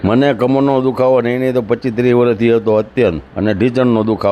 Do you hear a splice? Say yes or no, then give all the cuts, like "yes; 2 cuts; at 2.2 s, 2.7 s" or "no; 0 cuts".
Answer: no; 0 cuts